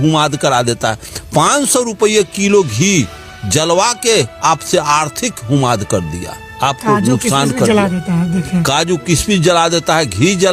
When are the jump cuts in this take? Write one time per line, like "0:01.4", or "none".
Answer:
0:01.1